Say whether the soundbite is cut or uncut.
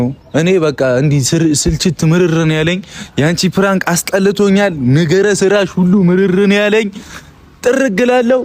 uncut